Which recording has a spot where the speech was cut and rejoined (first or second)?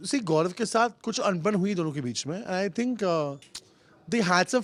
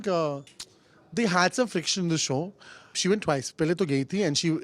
second